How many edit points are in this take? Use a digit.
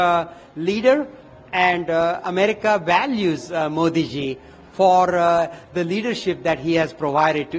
0